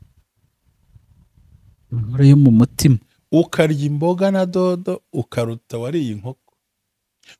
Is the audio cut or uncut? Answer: uncut